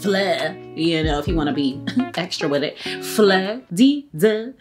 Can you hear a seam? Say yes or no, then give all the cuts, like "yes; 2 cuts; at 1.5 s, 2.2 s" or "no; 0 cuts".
yes; 1 cut; at 3.6 s